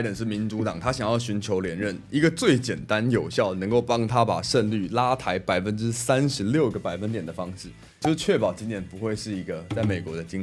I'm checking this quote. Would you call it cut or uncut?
uncut